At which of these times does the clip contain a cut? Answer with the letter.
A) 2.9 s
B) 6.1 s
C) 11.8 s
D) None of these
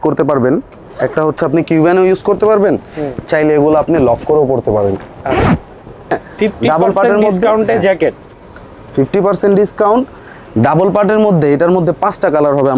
B